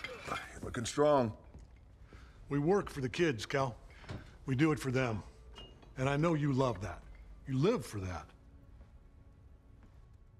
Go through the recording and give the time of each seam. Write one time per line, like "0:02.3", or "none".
none